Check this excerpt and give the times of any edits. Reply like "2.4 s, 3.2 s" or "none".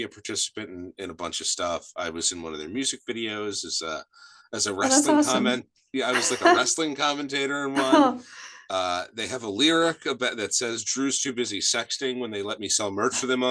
none

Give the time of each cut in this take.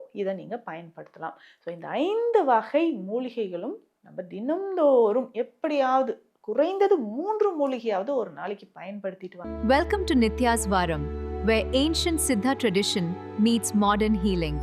9.3 s

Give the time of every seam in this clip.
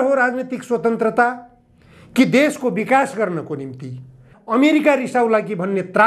4.3 s

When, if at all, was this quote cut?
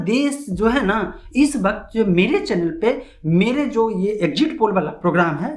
none

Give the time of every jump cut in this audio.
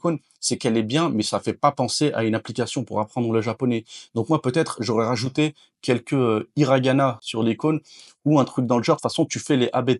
none

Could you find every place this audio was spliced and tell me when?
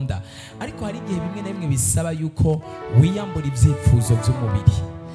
none

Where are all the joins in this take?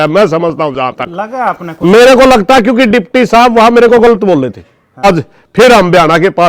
5.0 s

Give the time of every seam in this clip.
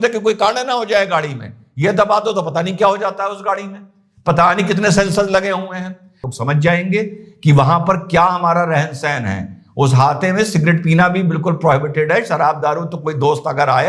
6.3 s

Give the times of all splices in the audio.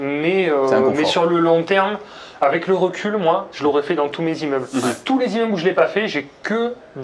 none

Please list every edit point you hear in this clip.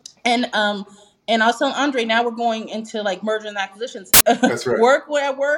4.1 s

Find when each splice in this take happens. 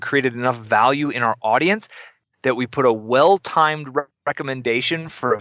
none

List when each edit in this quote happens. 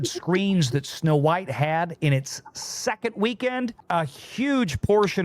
3.8 s

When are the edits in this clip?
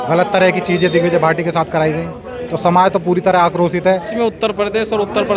4.1 s

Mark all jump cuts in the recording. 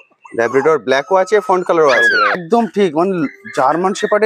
2.4 s

